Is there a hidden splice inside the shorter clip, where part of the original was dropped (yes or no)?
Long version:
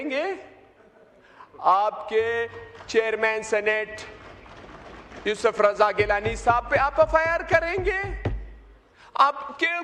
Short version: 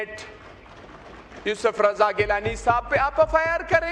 no